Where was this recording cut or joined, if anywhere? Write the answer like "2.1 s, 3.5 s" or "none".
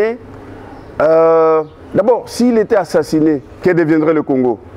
3.5 s